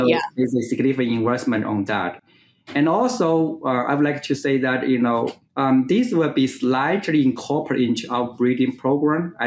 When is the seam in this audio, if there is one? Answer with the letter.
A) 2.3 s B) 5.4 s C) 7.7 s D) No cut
B